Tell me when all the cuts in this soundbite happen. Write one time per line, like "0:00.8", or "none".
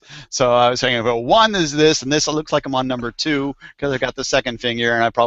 none